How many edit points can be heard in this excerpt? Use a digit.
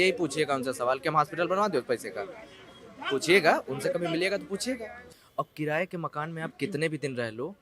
1